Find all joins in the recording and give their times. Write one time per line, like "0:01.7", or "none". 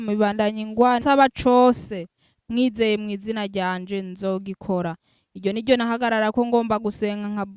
0:01.0